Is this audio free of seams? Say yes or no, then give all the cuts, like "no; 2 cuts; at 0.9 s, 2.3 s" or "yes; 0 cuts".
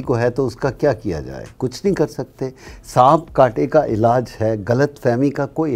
yes; 0 cuts